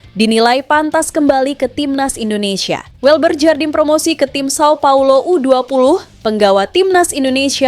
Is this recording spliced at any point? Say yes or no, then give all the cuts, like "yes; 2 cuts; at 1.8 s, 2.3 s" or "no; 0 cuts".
yes; 1 cut; at 2.9 s